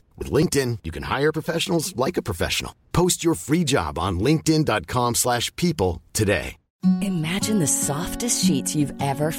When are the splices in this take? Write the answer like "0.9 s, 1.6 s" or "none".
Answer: 6.6 s